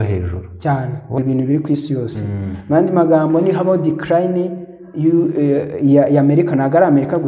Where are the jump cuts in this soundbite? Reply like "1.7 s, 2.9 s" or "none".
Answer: 1.2 s

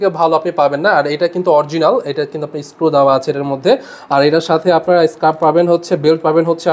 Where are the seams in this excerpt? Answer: none

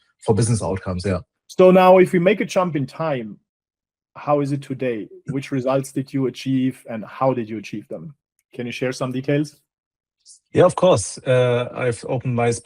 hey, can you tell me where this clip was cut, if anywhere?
1.4 s

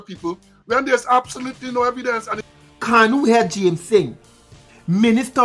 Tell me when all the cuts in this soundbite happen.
2.4 s

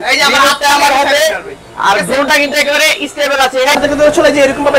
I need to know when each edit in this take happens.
3.8 s

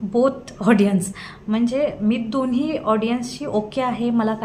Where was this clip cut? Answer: none

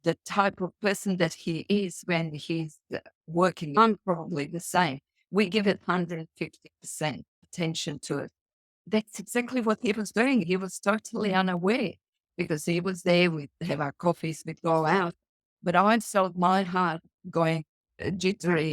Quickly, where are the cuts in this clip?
3.8 s, 7.4 s, 8.8 s, 10.4 s

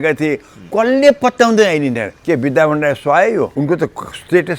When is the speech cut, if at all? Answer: 2.1 s, 3.5 s

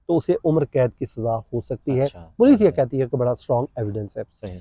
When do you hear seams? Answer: none

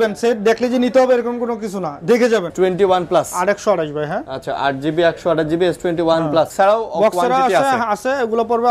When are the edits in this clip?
2.5 s, 6.5 s

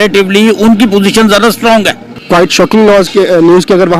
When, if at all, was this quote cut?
2.2 s

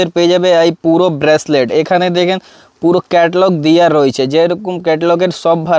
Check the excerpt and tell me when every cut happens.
none

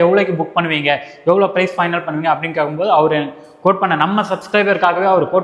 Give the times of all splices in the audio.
none

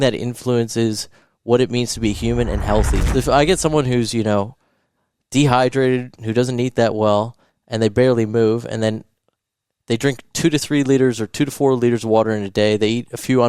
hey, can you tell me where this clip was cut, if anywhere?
3.0 s

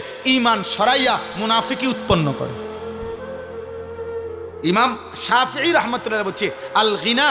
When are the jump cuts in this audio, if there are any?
2.5 s, 4.6 s

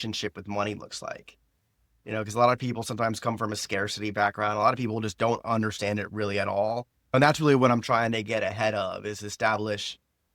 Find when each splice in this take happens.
7.1 s

